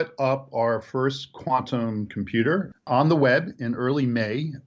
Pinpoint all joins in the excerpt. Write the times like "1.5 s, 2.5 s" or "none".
2.9 s